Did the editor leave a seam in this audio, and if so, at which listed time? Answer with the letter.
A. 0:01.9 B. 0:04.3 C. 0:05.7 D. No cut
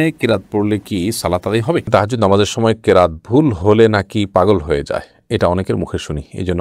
A